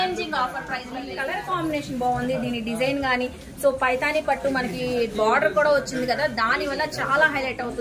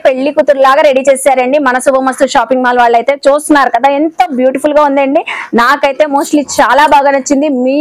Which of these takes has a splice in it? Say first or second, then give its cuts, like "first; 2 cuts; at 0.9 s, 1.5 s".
first; 1 cut; at 1.1 s